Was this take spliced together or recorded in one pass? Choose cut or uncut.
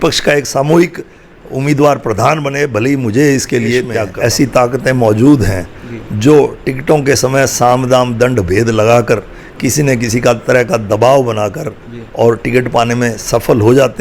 cut